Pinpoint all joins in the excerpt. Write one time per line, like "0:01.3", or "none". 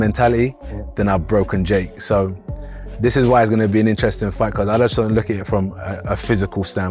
none